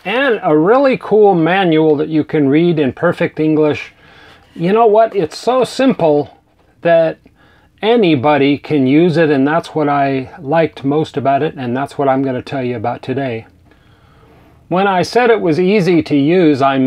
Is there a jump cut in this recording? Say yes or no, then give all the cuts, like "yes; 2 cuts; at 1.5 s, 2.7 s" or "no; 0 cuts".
yes; 1 cut; at 4.2 s